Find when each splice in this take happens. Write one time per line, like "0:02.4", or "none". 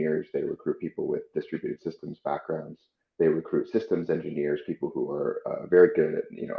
none